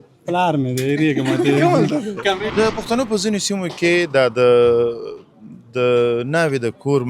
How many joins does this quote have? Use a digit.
1